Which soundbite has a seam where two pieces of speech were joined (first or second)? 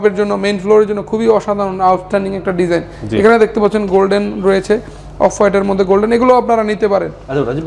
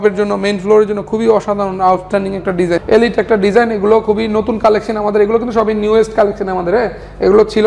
second